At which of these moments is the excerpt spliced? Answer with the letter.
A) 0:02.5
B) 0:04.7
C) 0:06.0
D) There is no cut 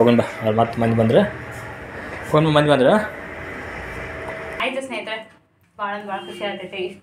B